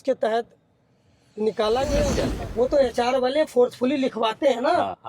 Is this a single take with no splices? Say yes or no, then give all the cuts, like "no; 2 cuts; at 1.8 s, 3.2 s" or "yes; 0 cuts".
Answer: no; 1 cut; at 2.2 s